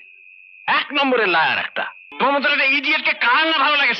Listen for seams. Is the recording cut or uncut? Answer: cut